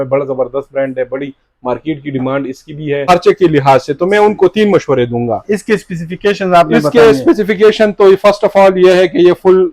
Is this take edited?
yes; 1 cut; at 3.0 s

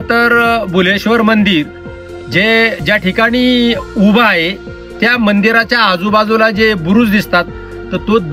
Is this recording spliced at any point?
no; 0 cuts

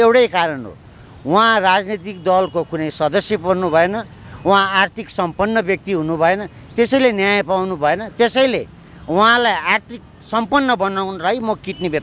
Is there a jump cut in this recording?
no; 0 cuts

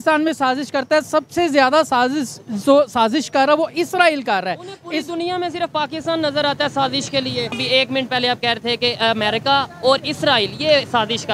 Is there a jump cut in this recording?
yes; 1 cut; at 7.5 s

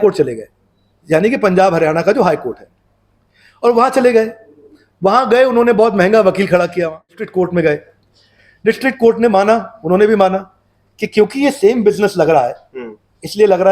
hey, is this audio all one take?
no; 1 cut; at 7.3 s

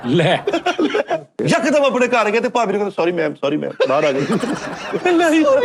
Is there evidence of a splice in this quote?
yes; 1 cut; at 1.4 s

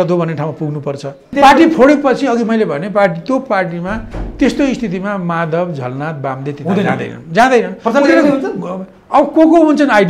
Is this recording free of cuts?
no; 1 cut; at 1.3 s

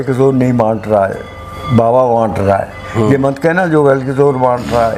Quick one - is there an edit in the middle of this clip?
no; 0 cuts

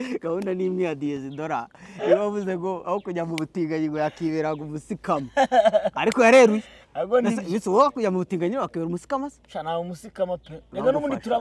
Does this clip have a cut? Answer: no; 0 cuts

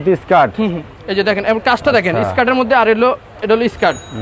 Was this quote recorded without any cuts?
yes; 0 cuts

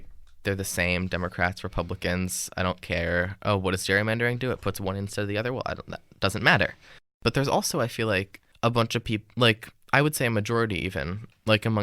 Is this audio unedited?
no; 2 cuts; at 7.1 s, 8.4 s

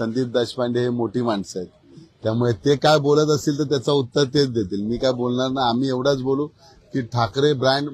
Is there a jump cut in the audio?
no; 0 cuts

